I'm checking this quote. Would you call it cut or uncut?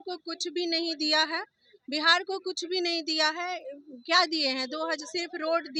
uncut